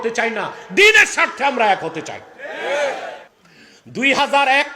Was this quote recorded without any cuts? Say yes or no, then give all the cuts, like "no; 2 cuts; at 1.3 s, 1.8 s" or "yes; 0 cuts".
no; 1 cut; at 3.3 s